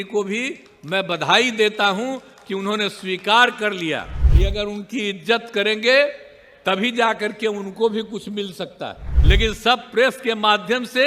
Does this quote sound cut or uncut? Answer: cut